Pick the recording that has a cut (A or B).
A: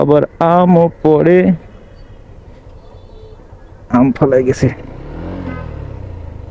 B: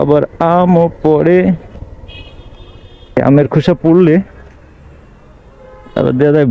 B